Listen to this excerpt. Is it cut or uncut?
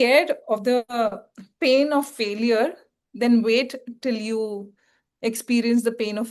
uncut